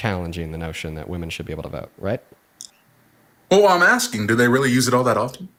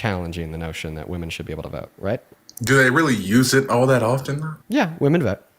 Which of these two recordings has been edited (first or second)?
second